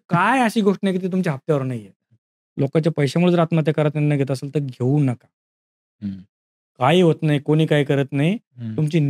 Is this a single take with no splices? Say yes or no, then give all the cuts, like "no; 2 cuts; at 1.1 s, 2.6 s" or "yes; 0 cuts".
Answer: no; 1 cut; at 2.2 s